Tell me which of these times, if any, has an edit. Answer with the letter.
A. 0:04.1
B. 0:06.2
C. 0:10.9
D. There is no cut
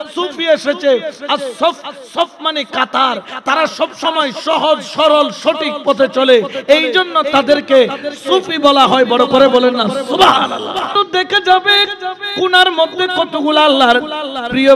C